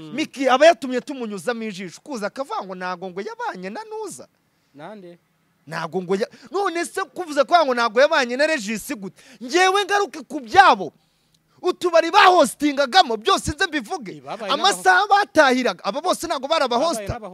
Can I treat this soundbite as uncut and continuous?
yes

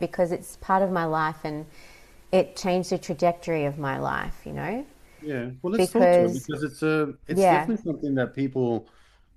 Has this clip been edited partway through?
no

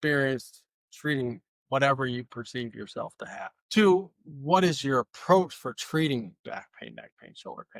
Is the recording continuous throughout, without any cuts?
no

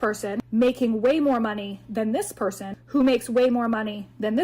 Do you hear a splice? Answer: no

